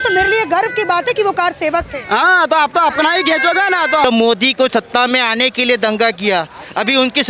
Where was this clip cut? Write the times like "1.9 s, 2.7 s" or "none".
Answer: 4.0 s

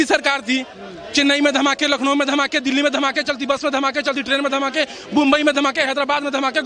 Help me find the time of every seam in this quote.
none

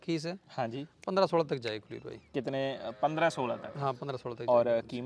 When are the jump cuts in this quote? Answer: none

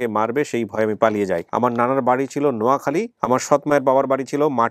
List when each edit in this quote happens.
1.5 s, 3.1 s

